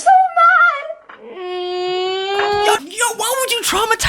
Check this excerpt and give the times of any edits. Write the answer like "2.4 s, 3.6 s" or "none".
2.9 s

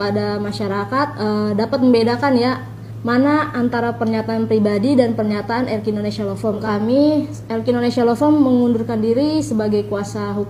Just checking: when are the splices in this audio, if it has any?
6.6 s

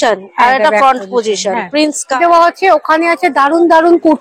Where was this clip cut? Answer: 2.1 s

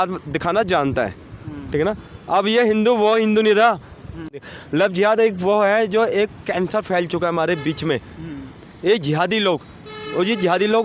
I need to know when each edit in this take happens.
4.5 s

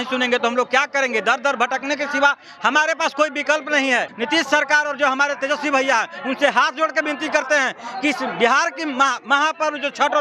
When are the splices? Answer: 4.1 s

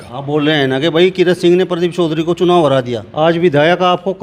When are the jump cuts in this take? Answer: 3.0 s

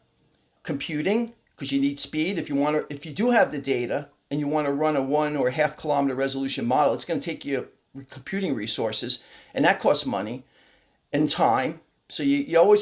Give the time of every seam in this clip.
none

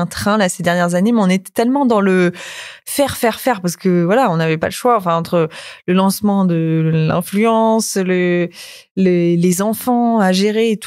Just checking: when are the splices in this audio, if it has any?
none

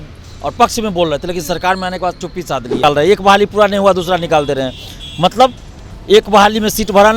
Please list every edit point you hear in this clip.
2.8 s

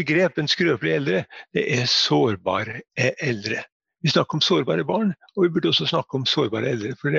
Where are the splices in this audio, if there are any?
none

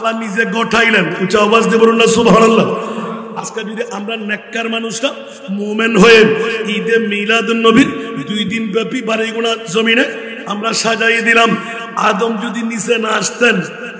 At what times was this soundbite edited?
none

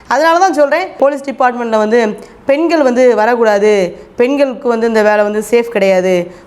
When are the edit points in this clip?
1.0 s

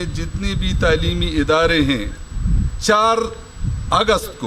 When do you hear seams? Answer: 2.7 s

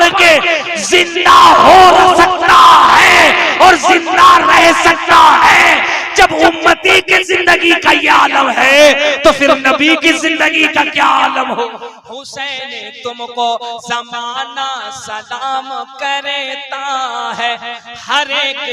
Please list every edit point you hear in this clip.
12.0 s

